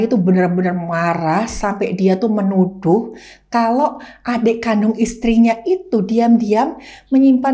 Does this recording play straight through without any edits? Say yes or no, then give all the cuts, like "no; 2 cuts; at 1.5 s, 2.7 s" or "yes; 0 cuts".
yes; 0 cuts